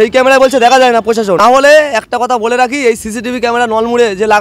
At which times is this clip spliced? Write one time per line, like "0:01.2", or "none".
0:01.4